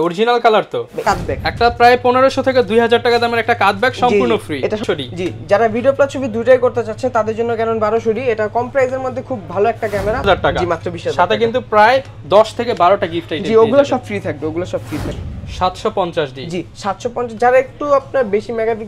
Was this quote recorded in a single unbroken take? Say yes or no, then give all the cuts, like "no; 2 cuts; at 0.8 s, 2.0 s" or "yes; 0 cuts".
no; 4 cuts; at 1.0 s, 4.8 s, 10.2 s, 15.1 s